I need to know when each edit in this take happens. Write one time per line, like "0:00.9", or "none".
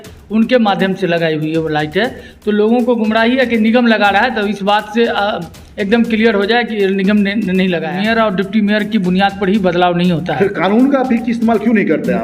0:07.9